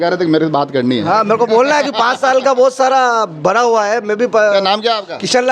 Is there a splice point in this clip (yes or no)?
no